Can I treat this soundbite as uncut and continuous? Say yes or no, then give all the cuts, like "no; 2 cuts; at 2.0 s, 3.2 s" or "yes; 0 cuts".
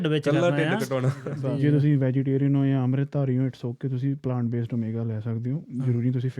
no; 1 cut; at 1.3 s